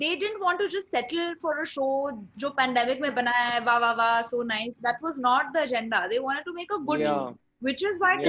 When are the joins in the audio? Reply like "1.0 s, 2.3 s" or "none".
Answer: none